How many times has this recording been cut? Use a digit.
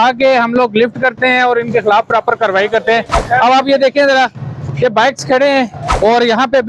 0